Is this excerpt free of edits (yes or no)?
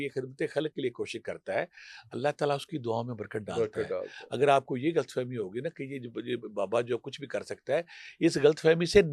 yes